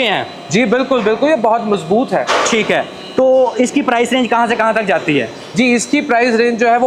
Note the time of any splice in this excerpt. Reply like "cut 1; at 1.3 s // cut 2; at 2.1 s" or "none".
none